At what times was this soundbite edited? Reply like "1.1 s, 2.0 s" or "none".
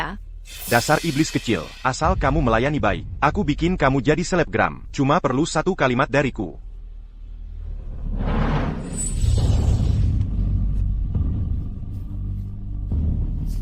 none